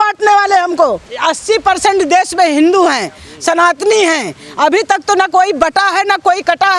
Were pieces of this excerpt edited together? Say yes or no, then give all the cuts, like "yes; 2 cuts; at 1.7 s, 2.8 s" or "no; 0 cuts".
yes; 1 cut; at 1.1 s